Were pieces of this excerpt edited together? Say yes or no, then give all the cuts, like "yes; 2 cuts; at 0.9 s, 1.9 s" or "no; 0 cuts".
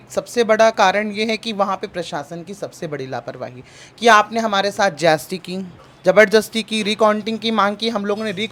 no; 0 cuts